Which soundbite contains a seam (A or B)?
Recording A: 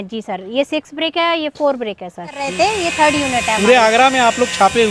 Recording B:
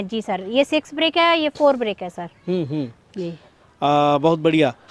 A